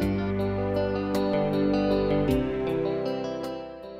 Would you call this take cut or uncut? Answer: uncut